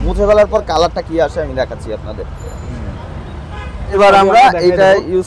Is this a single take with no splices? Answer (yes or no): no